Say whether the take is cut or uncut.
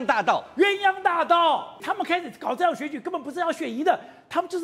cut